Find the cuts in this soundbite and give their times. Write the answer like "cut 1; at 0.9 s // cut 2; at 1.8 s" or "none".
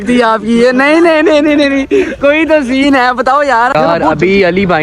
cut 1; at 3.8 s